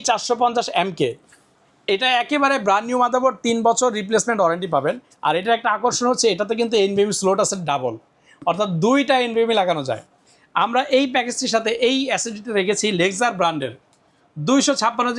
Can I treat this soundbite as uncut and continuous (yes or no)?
yes